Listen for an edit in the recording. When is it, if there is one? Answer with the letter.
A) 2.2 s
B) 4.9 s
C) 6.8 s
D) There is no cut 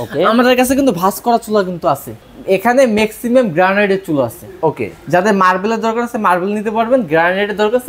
A